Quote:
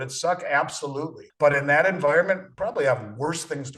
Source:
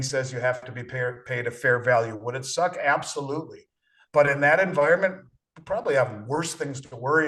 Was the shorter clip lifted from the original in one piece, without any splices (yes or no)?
no